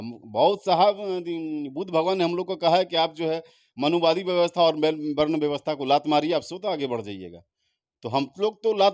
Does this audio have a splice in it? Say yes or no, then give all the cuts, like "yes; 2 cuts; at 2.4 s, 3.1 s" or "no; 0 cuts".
no; 0 cuts